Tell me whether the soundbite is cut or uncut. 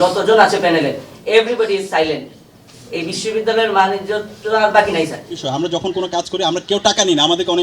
cut